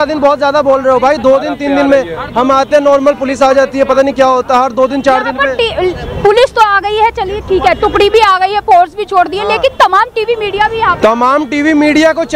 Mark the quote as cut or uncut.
uncut